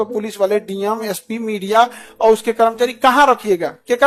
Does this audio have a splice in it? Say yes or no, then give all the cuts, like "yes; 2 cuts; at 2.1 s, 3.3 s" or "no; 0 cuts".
no; 0 cuts